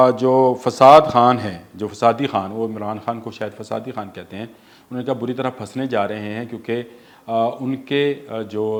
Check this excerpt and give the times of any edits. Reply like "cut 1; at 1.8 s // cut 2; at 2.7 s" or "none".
none